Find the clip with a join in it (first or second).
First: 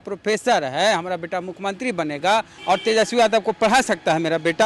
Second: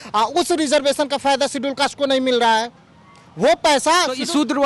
first